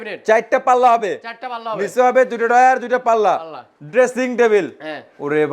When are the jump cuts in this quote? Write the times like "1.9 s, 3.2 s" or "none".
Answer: 3.6 s

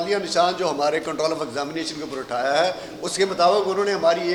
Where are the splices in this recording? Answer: none

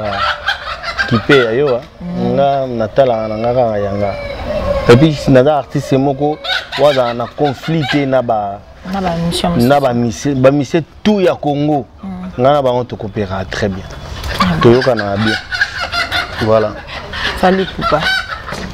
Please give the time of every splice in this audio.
none

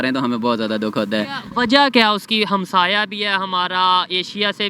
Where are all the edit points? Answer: none

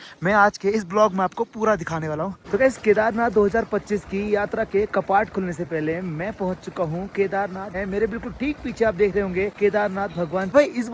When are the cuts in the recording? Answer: 2.3 s, 7.7 s, 9.9 s

